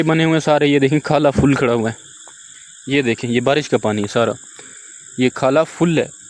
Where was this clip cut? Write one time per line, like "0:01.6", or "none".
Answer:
none